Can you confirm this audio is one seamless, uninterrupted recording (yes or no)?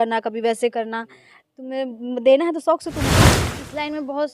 no